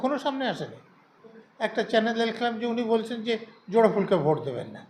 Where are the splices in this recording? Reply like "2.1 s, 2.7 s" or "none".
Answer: 1.4 s